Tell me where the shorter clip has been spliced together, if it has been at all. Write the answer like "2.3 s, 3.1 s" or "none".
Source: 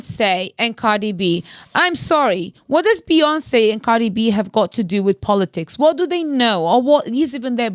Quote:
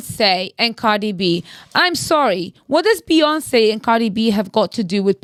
none